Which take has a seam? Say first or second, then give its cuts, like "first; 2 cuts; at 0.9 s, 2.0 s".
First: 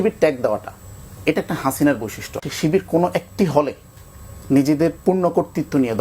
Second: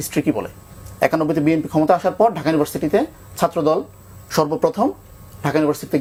first; 1 cut; at 2.4 s